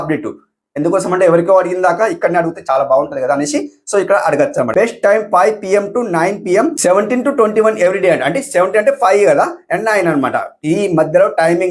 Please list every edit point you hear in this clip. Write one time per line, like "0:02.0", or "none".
0:04.7